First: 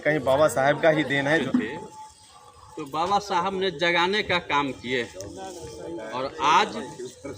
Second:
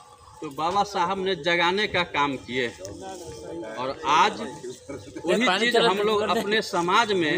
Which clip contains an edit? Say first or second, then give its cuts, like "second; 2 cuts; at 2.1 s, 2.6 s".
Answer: first; 1 cut; at 1.4 s